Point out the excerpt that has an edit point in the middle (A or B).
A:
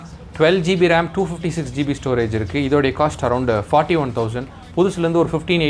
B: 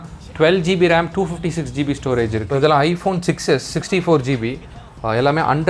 B